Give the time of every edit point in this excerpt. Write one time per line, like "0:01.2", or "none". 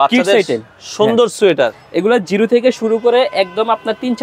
none

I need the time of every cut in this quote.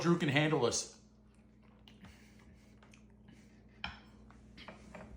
none

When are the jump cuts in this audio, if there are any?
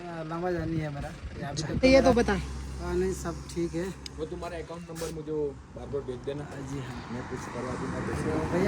0:01.8

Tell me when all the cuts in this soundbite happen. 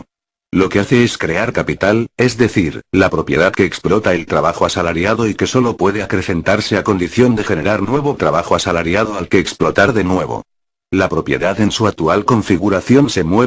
0:10.9

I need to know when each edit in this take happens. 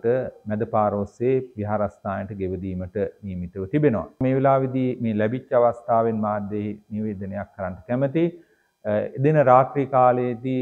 0:04.2

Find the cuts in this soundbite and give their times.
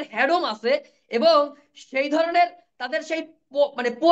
none

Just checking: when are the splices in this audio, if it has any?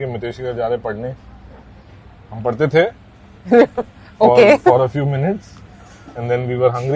none

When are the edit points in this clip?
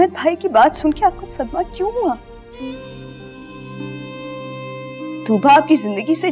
0:02.4
0:05.2

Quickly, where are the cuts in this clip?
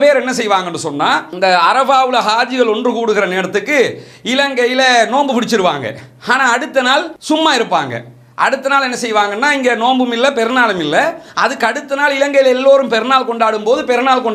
none

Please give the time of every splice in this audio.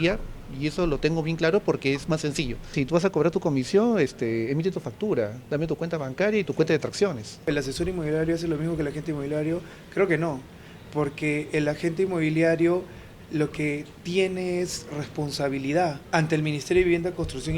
0:02.7
0:07.5
0:16.0

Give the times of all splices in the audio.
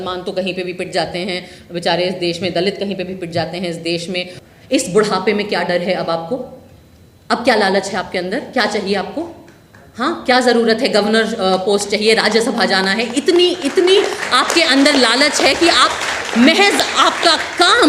0:04.4

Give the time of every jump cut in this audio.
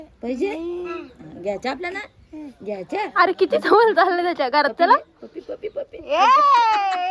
none

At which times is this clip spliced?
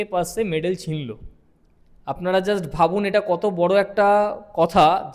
none

